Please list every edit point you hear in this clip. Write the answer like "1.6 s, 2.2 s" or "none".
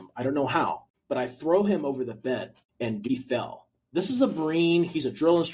0.9 s, 3.0 s

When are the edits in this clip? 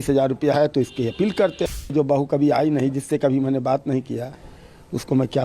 1.8 s

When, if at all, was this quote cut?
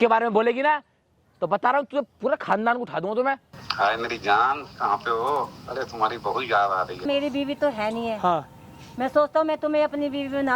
3.6 s, 7.0 s

